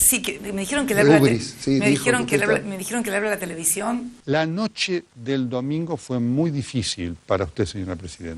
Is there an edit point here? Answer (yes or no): yes